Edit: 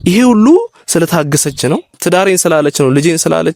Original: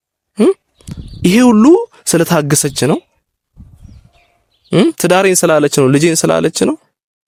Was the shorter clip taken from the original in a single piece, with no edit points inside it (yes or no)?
no